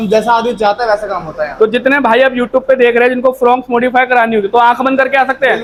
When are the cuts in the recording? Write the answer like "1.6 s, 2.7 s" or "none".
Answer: none